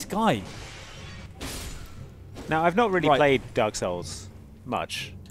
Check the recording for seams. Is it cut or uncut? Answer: cut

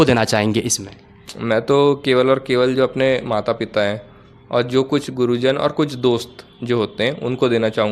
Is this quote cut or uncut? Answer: uncut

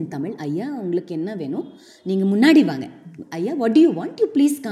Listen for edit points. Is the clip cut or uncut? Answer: uncut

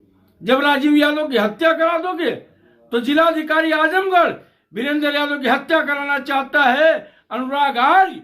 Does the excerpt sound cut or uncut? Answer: uncut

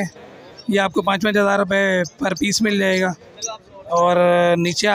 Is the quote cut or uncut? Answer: uncut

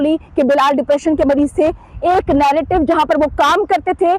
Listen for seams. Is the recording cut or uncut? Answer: uncut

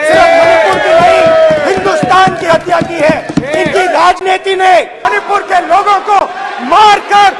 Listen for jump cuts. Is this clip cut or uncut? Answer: cut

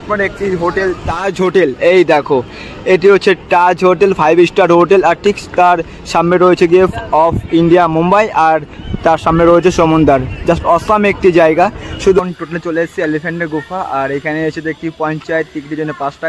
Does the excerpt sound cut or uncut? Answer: cut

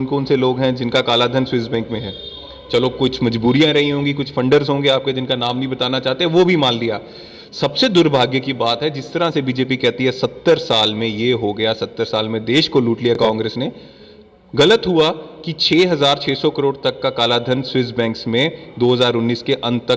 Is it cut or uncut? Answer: uncut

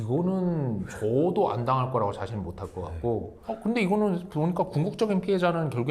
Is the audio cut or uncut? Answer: cut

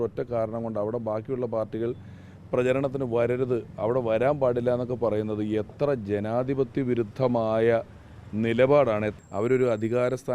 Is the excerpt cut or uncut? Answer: cut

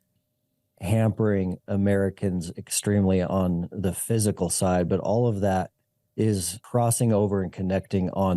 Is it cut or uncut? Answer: cut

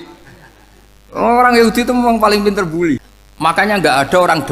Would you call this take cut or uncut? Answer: cut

